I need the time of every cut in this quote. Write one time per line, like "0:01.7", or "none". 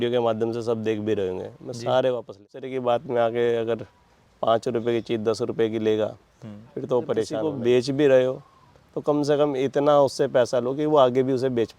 0:02.7
0:07.4